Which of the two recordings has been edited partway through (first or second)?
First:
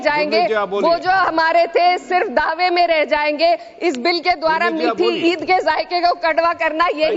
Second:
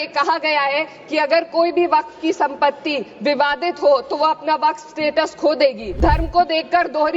second